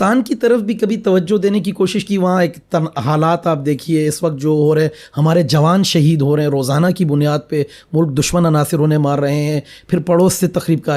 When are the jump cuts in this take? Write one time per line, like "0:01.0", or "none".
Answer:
none